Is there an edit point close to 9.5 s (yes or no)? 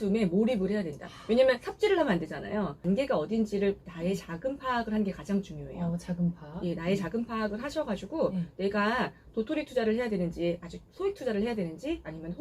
no